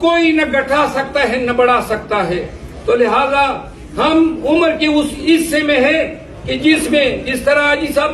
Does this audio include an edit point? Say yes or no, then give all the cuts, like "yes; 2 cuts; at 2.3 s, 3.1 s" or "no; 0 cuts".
no; 0 cuts